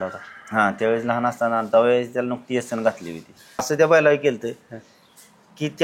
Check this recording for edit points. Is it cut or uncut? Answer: cut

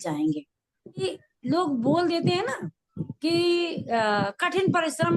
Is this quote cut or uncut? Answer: cut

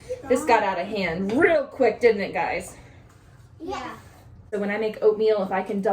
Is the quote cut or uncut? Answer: cut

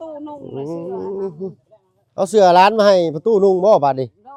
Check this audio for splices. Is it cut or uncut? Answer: uncut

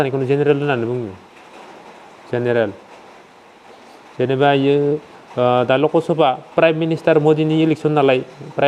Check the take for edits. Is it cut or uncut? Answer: uncut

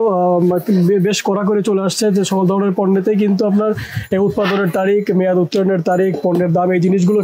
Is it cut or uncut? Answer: uncut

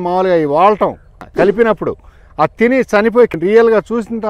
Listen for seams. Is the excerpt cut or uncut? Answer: cut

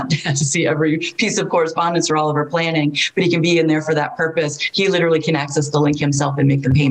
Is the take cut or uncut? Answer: uncut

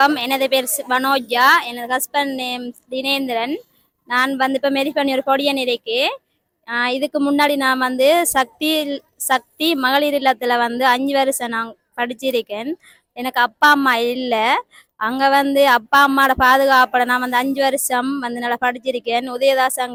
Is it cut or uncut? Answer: uncut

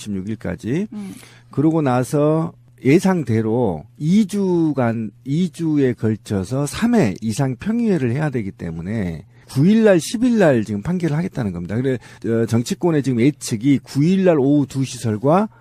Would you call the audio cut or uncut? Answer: uncut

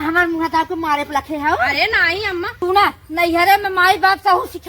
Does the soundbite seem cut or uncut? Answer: cut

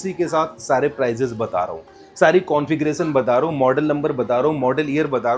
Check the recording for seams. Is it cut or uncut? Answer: uncut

